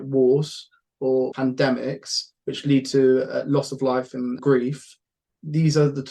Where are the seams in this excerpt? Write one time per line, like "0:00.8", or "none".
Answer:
0:01.3
0:04.4